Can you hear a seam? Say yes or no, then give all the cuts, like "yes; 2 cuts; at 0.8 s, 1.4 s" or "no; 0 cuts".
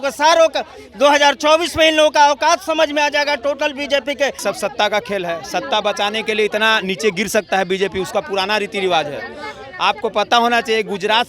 yes; 1 cut; at 4.4 s